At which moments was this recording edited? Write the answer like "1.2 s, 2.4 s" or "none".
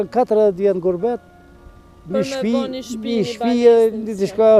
none